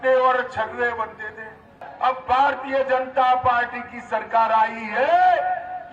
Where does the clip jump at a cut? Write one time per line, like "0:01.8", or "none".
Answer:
0:01.8